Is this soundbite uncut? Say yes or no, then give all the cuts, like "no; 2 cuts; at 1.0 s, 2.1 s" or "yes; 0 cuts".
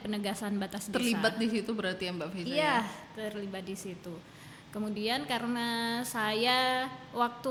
yes; 0 cuts